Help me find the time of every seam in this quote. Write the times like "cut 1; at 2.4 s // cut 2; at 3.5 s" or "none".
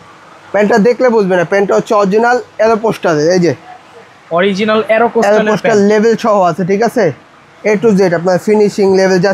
none